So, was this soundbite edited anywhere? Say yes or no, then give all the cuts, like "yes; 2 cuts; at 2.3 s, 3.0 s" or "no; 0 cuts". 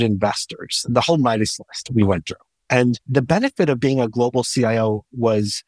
yes; 1 cut; at 3.0 s